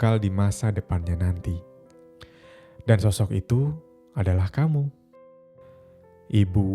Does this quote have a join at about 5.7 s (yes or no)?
yes